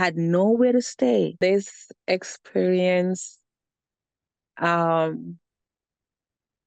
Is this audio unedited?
no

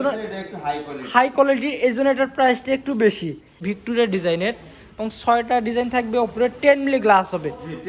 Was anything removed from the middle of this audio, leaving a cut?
yes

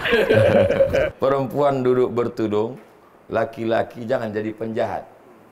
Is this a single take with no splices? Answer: no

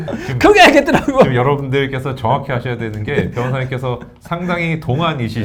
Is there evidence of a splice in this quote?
no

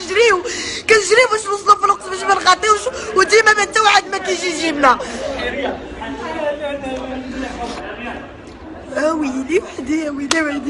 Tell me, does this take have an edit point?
yes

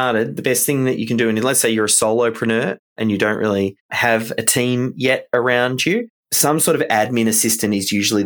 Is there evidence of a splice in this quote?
yes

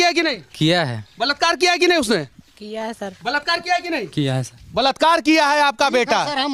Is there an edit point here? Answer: no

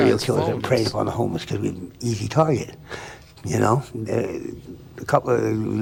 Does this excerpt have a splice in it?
no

